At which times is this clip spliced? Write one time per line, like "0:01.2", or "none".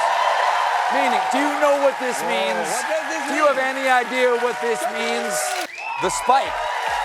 0:05.7